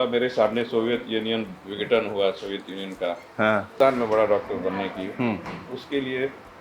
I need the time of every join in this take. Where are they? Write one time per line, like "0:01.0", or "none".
0:03.7